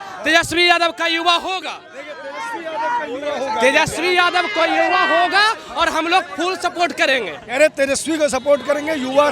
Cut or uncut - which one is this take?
uncut